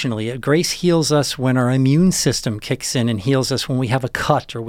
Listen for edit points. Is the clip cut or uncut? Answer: uncut